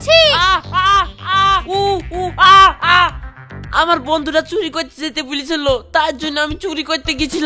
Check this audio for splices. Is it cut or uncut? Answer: uncut